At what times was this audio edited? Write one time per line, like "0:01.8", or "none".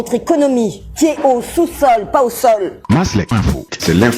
0:02.7